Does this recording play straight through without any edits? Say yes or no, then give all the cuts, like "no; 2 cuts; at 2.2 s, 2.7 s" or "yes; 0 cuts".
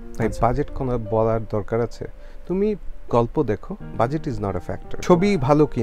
no; 1 cut; at 4.9 s